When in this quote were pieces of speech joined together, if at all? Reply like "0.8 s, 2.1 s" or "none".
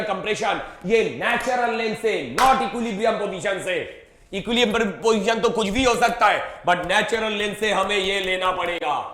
none